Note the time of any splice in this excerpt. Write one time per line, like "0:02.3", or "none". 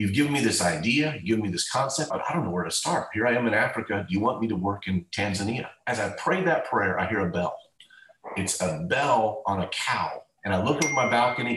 0:02.1
0:05.7
0:10.2